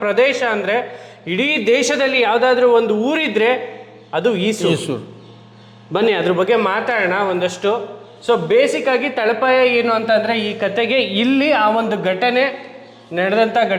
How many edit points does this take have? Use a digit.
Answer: 0